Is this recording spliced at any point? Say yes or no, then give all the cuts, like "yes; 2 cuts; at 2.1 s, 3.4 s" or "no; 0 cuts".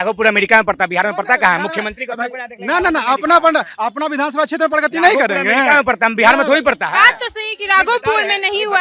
no; 0 cuts